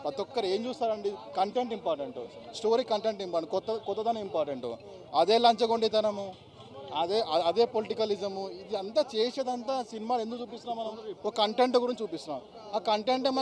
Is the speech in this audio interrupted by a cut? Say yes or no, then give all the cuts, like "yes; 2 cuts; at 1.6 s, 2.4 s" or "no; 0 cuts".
no; 0 cuts